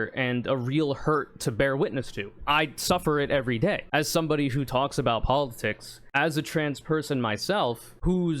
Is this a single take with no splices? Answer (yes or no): no